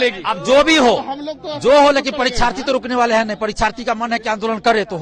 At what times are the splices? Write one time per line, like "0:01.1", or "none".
none